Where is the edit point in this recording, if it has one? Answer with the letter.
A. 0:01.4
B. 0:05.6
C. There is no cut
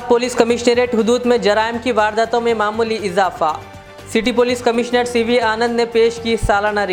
C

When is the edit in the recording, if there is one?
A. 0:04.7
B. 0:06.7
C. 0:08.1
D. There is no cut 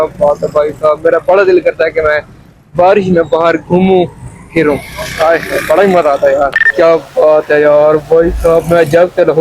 B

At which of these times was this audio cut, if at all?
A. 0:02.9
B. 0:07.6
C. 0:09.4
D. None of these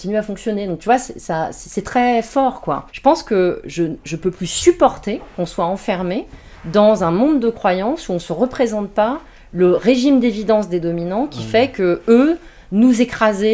A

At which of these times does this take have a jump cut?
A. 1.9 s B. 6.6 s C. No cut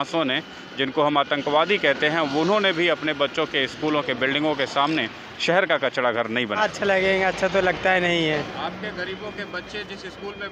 B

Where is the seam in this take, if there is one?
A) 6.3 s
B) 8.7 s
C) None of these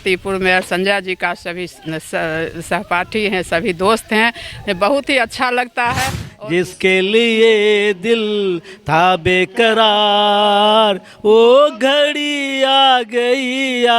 A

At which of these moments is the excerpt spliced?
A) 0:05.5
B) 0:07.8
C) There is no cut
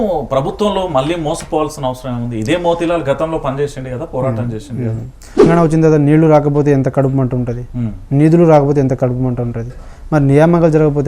A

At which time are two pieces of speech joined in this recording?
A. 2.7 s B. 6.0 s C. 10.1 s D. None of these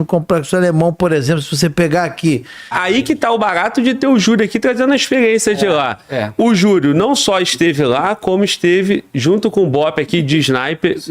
A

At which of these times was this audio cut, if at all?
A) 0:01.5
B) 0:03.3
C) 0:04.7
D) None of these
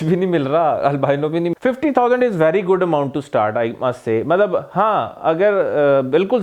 A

